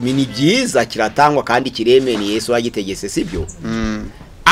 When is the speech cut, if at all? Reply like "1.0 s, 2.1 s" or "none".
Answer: none